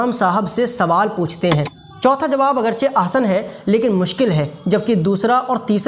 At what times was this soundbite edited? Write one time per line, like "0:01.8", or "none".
0:01.7